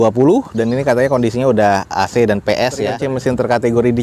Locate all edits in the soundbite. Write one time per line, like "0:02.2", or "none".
0:03.0